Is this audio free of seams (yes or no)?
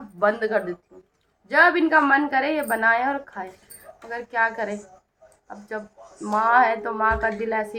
yes